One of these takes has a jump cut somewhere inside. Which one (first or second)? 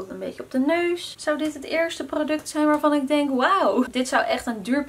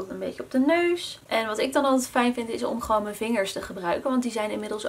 first